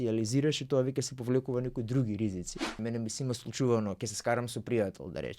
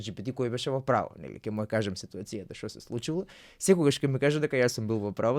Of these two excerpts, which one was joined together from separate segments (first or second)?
first